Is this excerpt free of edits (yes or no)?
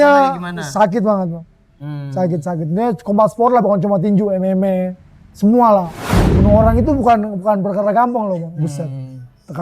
no